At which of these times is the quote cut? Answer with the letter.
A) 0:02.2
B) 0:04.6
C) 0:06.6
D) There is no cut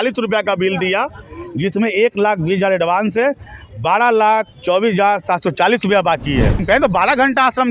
C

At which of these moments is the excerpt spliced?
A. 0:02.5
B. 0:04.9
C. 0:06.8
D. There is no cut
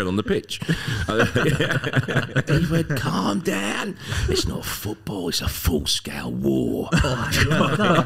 A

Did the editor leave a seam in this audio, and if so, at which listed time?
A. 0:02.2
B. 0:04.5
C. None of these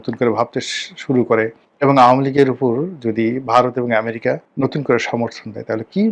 B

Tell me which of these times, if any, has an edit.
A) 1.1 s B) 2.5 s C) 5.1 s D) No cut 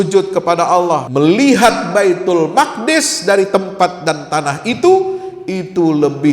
A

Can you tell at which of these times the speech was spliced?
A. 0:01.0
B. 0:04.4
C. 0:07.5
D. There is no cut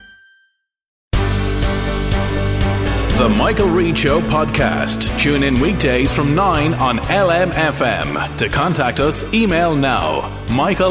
A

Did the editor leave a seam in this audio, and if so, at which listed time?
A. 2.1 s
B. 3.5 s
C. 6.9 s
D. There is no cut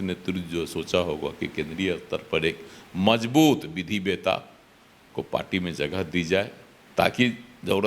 D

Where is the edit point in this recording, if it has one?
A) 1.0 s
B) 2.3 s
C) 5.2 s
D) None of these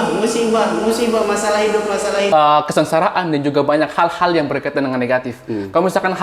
B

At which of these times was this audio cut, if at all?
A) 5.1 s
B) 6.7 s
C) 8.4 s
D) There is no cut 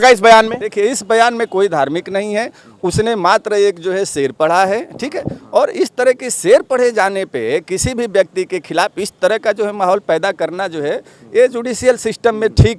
D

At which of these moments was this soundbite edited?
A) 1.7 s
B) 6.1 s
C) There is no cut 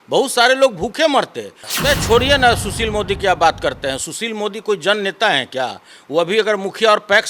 A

